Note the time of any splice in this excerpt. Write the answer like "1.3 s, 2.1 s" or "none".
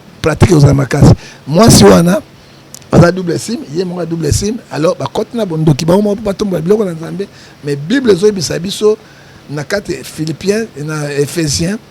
none